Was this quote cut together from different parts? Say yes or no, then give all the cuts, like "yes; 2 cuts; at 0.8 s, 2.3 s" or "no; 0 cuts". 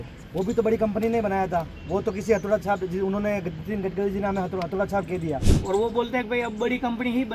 yes; 1 cut; at 5.5 s